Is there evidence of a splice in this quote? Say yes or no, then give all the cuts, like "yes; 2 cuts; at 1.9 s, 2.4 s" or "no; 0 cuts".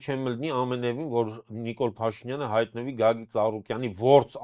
no; 0 cuts